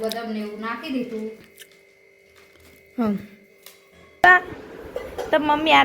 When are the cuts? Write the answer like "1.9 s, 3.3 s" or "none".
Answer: 4.2 s